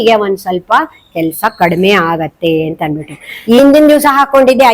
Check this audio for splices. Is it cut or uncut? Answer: cut